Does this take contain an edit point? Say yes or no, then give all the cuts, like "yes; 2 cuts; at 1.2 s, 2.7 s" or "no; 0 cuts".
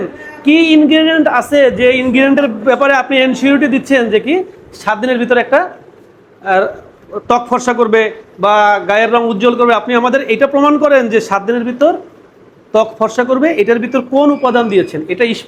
no; 0 cuts